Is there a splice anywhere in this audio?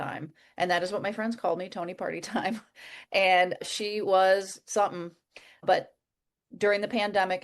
yes; 2 cuts; at 3.6 s, 5.6 s

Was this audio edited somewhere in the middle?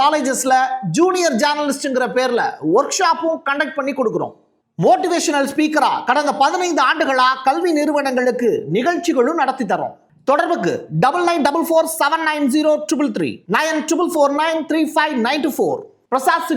no; 0 cuts

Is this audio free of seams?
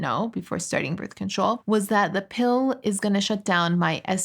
no; 1 cut; at 1.6 s

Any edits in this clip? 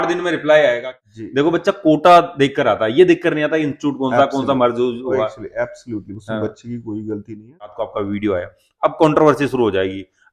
yes; 2 cuts; at 0.9 s, 7.7 s

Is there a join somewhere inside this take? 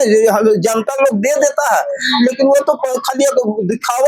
no; 0 cuts

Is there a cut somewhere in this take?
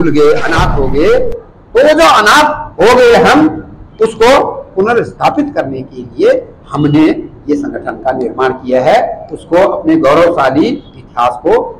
no; 0 cuts

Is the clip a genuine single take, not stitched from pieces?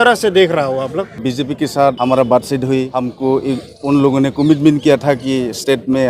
no; 3 cuts; at 1.1 s, 2.0 s, 3.0 s

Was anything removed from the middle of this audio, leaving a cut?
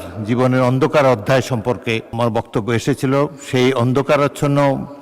yes; 1 cut; at 2.1 s

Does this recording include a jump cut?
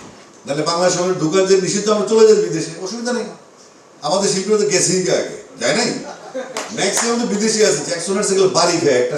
no; 0 cuts

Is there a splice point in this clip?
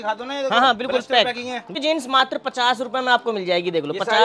yes; 1 cut; at 1.7 s

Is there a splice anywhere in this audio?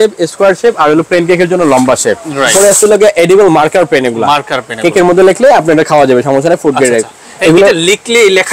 yes; 1 cut; at 2.5 s

